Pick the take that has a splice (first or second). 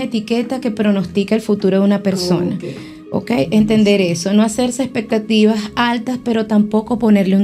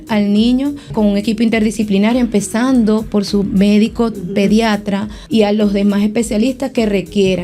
second